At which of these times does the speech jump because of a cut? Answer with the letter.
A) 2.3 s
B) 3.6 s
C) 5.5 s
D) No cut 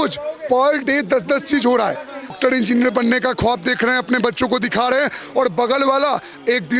A